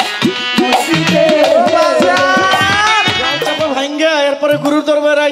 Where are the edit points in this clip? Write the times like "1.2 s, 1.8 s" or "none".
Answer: 3.4 s